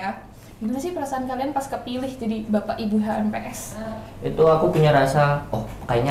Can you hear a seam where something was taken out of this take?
yes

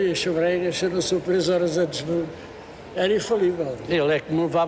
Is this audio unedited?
yes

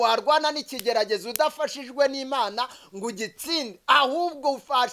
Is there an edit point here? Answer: no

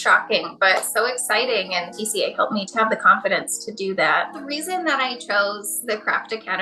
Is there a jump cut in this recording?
yes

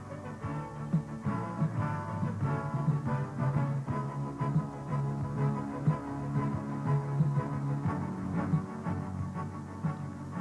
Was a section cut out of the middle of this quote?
yes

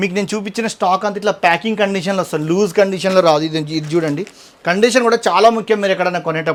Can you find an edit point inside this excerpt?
no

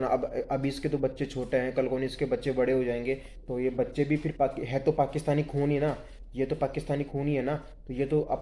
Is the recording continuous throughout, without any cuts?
yes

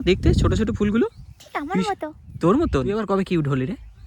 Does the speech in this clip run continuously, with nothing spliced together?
no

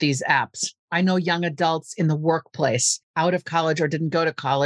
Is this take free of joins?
no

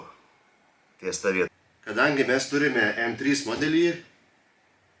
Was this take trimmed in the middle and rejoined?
yes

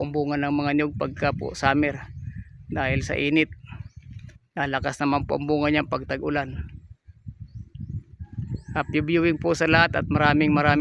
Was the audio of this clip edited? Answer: no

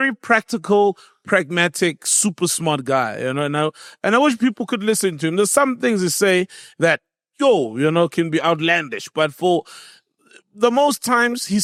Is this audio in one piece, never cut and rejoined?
yes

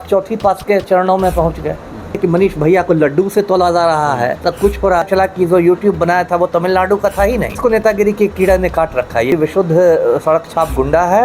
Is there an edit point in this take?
yes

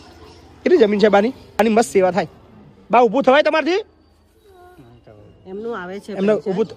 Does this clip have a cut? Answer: yes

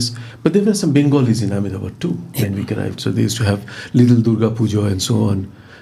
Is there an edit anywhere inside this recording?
no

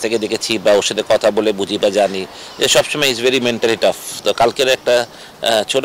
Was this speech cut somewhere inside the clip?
no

